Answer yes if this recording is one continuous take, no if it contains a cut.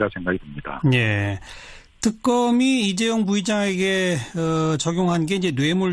no